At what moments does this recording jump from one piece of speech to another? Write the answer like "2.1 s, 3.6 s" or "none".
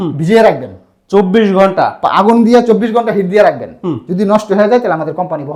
none